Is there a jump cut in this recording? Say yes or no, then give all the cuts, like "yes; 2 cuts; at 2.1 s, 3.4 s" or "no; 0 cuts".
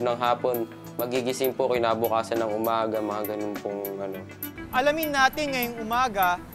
no; 0 cuts